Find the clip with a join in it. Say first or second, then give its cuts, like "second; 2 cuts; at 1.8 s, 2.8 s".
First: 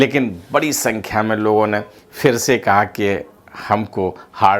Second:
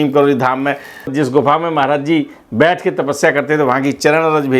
second; 1 cut; at 1.1 s